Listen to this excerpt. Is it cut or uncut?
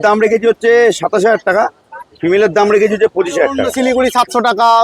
cut